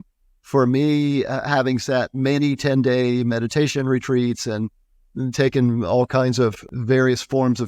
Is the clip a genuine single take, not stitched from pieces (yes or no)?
no